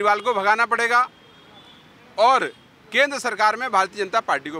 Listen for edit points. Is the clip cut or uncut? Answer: uncut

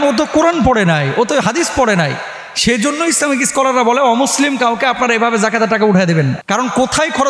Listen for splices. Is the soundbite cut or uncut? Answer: cut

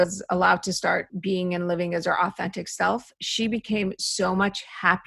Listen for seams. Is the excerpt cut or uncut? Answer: cut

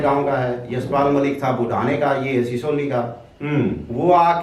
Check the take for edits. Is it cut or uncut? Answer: uncut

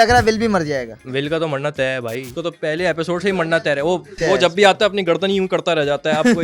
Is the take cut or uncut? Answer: cut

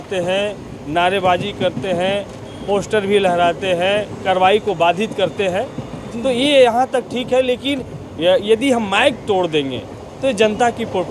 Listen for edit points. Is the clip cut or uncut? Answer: cut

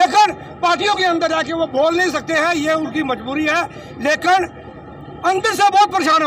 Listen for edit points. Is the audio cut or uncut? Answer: uncut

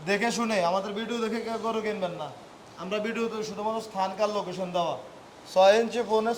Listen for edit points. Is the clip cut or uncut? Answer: uncut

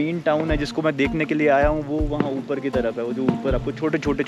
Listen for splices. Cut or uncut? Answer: uncut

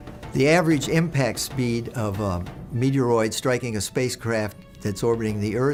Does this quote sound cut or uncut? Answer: uncut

